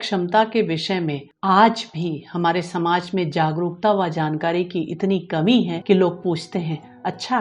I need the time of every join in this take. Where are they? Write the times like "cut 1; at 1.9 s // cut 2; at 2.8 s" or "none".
cut 1; at 1.3 s // cut 2; at 5.8 s